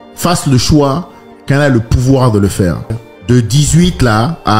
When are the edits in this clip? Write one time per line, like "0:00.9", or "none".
0:03.1